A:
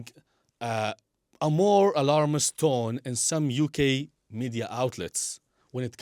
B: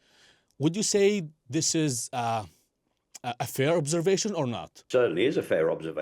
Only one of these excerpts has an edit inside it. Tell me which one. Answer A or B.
B